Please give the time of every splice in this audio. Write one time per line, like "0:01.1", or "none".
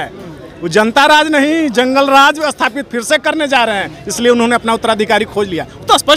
none